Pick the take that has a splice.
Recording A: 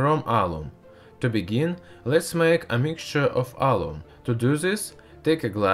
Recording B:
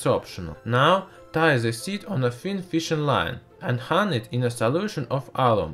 B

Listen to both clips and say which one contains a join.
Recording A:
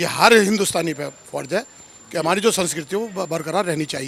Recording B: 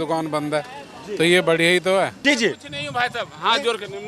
B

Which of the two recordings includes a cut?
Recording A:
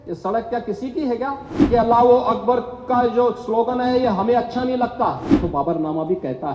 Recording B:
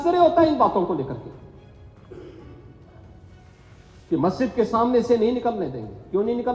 A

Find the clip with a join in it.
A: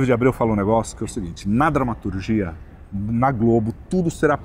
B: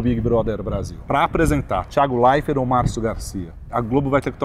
B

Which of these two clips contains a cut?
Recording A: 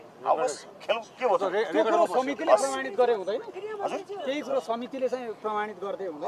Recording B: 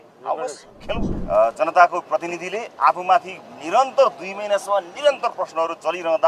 B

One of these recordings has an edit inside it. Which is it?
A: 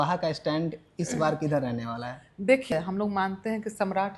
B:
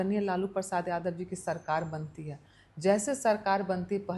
A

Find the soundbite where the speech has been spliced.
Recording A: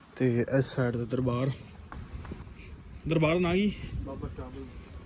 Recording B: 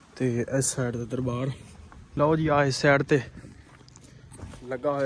B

